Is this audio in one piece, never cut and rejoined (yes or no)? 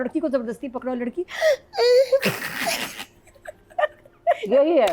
yes